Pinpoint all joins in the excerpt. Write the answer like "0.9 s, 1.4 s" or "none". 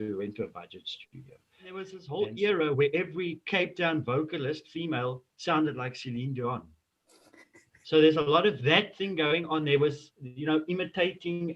2.0 s